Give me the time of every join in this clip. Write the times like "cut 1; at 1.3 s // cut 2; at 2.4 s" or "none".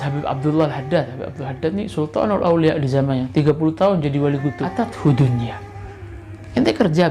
cut 1; at 4.8 s